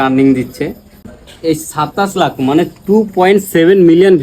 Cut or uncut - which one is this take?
cut